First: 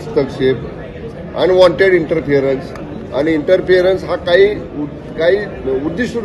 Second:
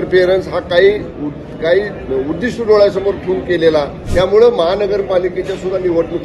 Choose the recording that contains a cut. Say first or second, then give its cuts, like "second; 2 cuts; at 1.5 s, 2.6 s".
second; 1 cut; at 4.0 s